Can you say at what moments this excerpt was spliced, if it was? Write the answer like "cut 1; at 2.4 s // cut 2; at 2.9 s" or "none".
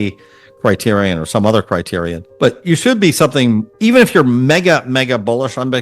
cut 1; at 2.2 s // cut 2; at 3.7 s